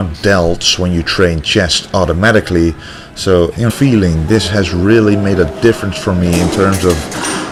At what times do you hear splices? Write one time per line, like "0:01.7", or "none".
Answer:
none